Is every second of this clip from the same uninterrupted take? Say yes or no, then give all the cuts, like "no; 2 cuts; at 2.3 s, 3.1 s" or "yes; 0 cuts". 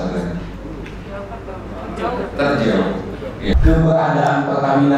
no; 1 cut; at 3.5 s